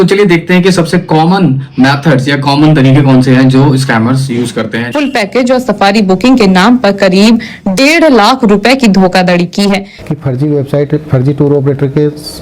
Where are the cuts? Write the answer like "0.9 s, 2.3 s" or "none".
4.8 s, 9.9 s